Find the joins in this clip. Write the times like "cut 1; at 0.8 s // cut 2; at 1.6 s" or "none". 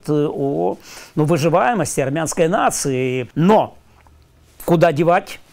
cut 1; at 3.2 s